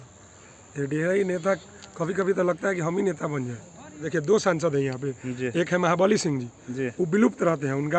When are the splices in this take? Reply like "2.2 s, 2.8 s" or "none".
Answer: 4.0 s